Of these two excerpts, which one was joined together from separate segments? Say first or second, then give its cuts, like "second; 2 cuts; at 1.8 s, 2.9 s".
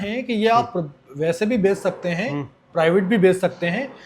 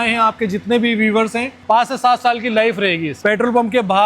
second; 2 cuts; at 1.5 s, 3.2 s